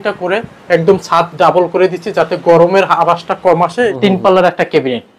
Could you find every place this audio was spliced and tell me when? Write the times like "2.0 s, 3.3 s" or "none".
3.9 s